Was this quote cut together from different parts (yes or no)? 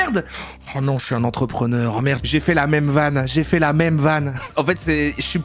yes